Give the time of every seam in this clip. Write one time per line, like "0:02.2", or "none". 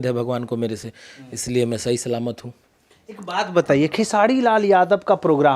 none